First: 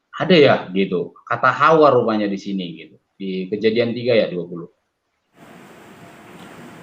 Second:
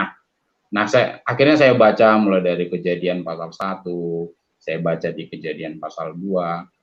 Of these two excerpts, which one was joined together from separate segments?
first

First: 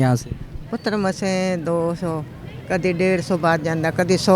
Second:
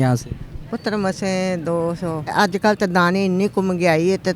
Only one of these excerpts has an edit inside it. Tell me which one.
second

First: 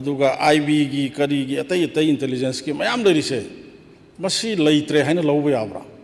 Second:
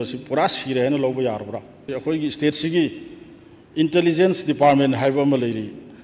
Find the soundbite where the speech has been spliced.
second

